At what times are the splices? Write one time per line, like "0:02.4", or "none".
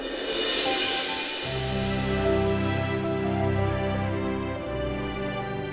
none